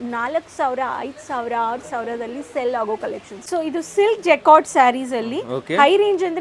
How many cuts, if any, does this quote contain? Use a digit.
1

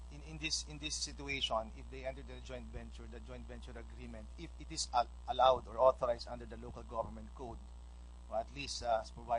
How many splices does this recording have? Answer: 1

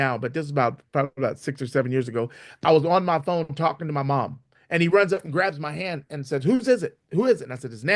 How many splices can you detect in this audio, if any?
0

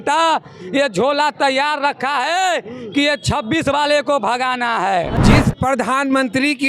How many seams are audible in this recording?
1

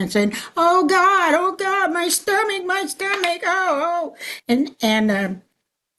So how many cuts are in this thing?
0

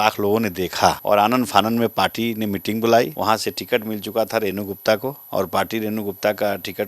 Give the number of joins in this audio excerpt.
3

